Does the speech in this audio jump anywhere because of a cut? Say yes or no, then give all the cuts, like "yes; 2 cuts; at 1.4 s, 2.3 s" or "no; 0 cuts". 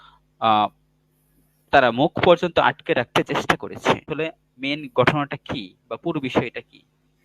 yes; 1 cut; at 4.1 s